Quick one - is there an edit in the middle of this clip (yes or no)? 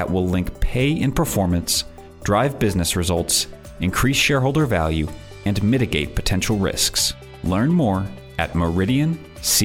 no